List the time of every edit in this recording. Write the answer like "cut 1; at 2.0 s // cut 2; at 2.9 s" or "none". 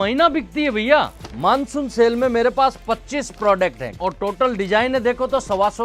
cut 1; at 1.2 s // cut 2; at 3.9 s